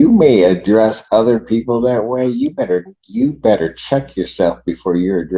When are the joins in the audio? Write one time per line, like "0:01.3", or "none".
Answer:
none